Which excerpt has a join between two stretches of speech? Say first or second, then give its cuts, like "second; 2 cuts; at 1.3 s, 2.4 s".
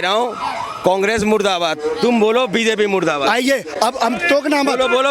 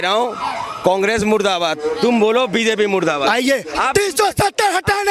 second; 1 cut; at 3.7 s